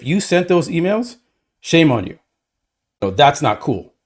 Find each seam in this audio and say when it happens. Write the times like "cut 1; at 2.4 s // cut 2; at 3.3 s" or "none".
cut 1; at 3.0 s

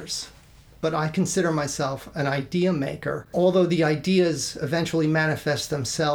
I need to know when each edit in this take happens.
none

